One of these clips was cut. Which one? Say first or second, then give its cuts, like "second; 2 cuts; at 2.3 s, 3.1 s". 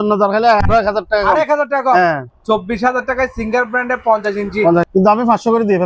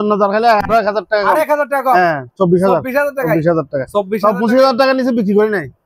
first; 2 cuts; at 2.3 s, 4.8 s